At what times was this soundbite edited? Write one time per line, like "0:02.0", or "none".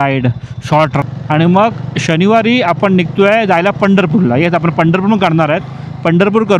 0:01.0